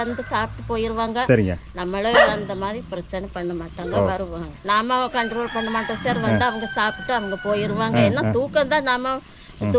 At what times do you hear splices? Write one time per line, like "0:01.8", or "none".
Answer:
0:04.5